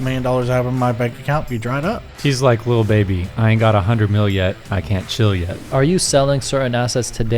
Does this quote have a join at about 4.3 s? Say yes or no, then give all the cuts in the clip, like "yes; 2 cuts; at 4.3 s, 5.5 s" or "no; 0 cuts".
no; 2 cuts; at 2.1 s, 5.5 s